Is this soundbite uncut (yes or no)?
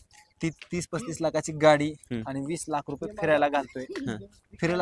yes